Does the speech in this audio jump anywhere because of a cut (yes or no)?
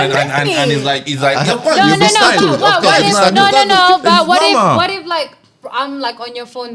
no